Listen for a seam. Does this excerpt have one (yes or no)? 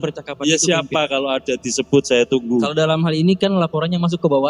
no